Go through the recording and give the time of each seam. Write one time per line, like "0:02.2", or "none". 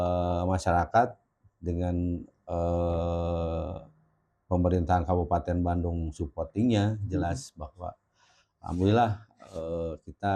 none